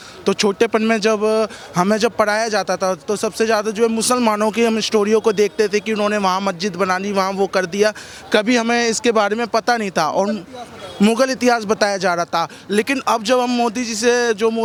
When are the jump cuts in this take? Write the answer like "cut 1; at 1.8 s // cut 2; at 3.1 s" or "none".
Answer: none

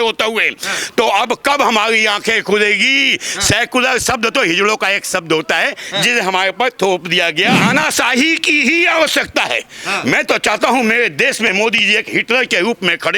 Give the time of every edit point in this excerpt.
cut 1; at 7.6 s

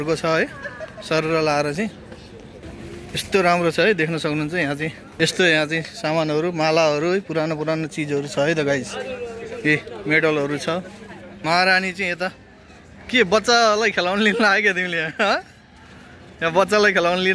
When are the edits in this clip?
cut 1; at 5.0 s // cut 2; at 11.3 s

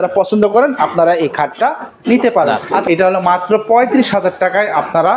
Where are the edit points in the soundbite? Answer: cut 1; at 2.7 s

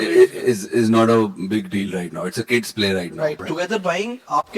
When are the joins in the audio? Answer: cut 1; at 3.5 s

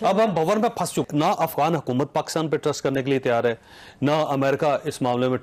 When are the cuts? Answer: none

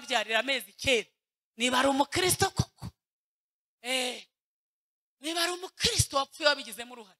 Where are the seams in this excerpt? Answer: none

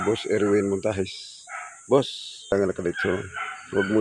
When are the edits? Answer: cut 1; at 2.5 s

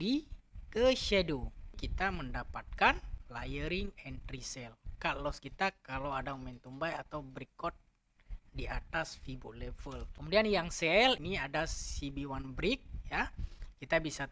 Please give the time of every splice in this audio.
cut 1; at 1.9 s // cut 2; at 3.1 s // cut 3; at 10.1 s // cut 4; at 11.2 s

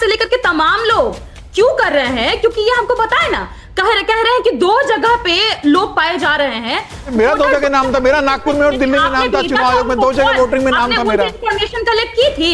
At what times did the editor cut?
cut 1; at 7.0 s

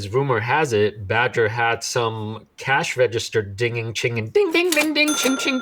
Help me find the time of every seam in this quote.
none

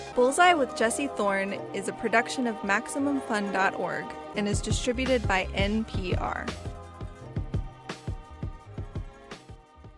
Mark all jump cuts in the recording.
none

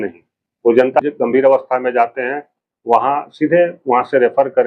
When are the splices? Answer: cut 1; at 1.0 s

